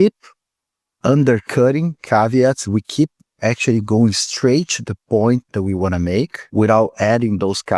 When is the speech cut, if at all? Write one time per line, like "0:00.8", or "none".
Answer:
0:06.4